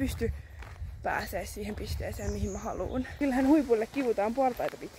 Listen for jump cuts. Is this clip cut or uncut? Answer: cut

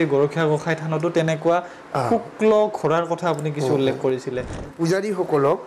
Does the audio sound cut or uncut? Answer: cut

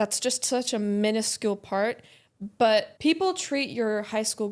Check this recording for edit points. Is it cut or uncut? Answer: cut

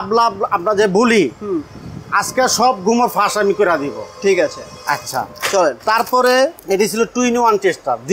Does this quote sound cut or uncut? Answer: uncut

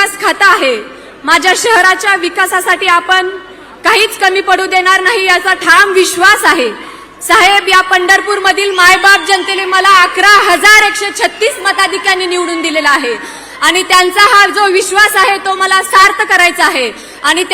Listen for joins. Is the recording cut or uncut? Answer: uncut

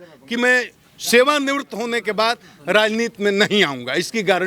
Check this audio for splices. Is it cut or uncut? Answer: uncut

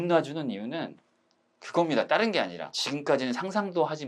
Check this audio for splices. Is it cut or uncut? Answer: cut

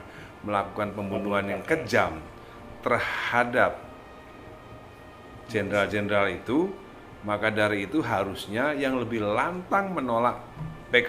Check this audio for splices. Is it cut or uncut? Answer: uncut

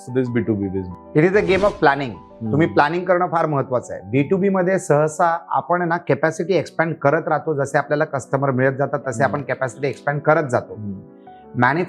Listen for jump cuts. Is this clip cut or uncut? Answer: cut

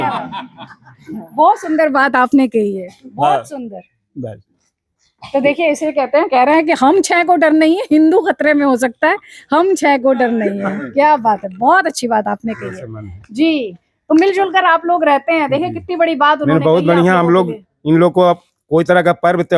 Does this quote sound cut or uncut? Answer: uncut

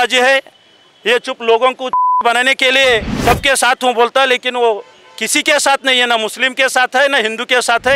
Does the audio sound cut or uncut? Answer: uncut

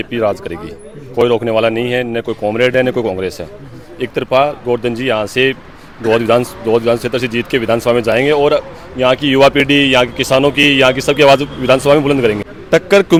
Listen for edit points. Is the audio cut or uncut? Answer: uncut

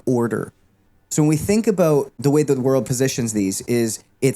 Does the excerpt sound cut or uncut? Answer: cut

